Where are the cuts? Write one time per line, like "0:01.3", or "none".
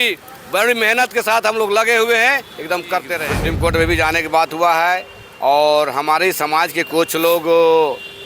0:03.5